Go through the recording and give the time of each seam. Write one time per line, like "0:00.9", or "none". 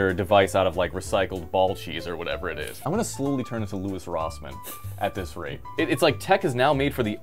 0:02.7
0:05.6